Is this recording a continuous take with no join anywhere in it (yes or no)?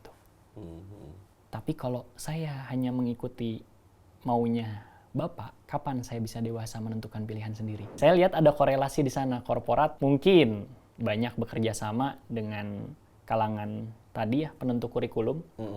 no